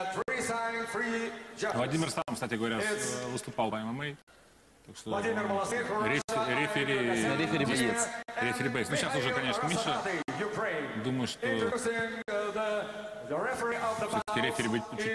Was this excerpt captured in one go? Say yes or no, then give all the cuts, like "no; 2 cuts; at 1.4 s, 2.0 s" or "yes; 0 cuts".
yes; 0 cuts